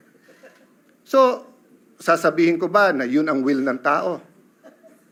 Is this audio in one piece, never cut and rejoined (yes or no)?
yes